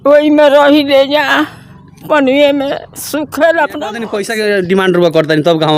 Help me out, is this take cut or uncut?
cut